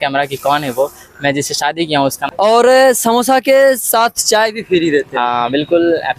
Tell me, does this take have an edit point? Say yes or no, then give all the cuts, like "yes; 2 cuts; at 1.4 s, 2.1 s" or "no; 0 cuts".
yes; 1 cut; at 2.2 s